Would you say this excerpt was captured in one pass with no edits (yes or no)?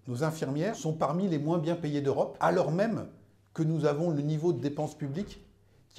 no